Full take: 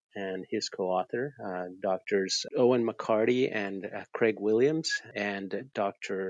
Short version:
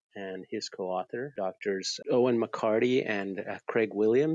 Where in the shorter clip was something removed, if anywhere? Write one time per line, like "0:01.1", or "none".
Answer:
0:01.3